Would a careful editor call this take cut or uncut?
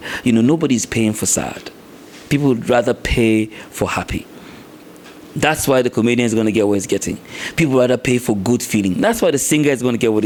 uncut